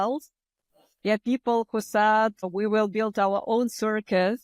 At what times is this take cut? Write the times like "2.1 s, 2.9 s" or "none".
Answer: 2.5 s